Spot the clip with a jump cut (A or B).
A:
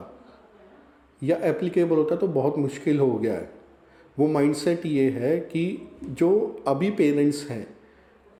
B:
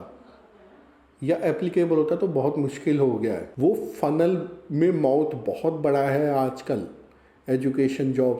B